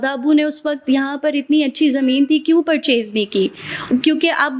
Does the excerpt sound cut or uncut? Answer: uncut